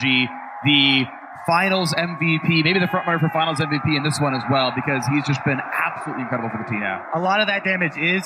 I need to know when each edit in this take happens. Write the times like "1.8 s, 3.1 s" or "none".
4.7 s